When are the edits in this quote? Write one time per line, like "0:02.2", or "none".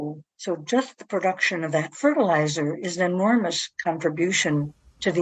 none